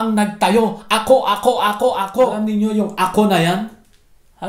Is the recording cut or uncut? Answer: cut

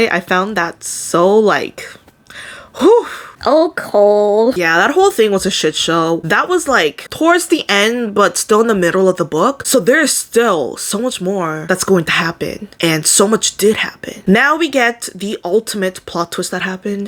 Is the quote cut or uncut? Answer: uncut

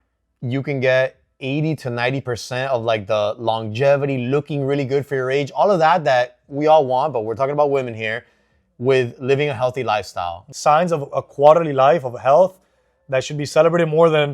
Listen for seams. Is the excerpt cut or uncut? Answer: cut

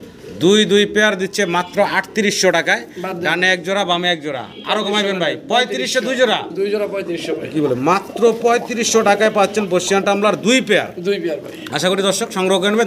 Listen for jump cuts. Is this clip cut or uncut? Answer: uncut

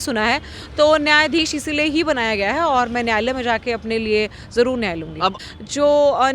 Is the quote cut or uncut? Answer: cut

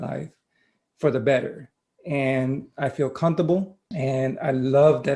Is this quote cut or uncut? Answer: cut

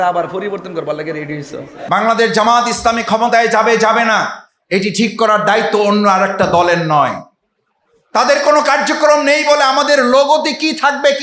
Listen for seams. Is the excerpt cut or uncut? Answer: cut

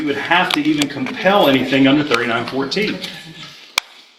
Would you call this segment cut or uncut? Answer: uncut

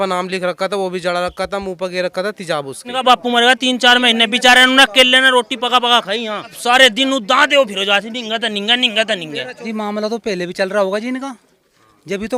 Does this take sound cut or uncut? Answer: cut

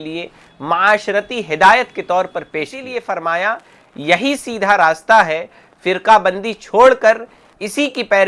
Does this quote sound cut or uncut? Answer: cut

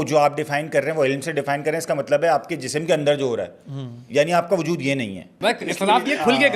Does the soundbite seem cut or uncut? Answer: cut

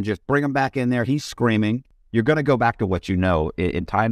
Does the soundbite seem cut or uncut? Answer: cut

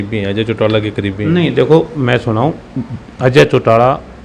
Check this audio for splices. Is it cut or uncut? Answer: uncut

